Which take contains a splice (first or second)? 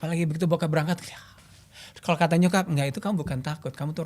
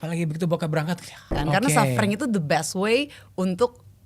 second